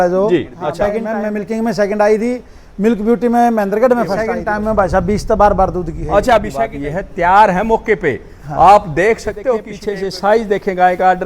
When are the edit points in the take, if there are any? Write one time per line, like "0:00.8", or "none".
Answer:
0:01.0
0:04.4
0:06.6
0:09.8